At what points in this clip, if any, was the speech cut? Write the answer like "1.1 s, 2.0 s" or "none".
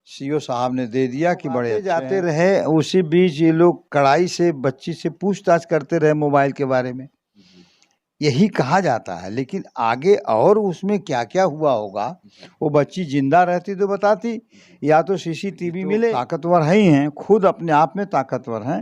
1.8 s, 16.2 s